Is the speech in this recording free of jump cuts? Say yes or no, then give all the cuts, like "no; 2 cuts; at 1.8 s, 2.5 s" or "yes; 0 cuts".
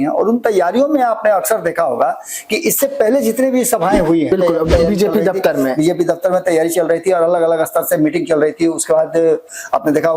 no; 1 cut; at 4.3 s